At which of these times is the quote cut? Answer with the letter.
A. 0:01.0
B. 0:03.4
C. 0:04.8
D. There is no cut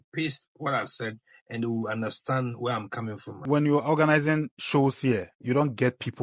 B